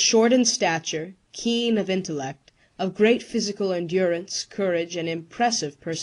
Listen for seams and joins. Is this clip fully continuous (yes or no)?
no